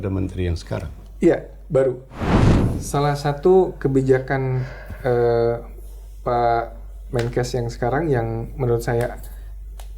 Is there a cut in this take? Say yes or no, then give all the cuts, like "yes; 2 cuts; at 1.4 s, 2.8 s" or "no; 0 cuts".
yes; 1 cut; at 2.6 s